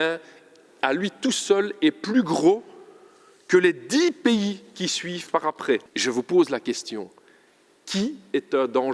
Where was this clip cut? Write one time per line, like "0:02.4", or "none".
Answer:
0:05.8